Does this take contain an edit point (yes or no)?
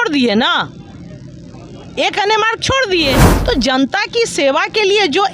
yes